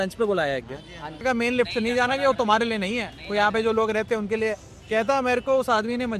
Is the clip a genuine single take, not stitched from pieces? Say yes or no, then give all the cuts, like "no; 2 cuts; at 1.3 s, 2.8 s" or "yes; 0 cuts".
no; 1 cut; at 1.2 s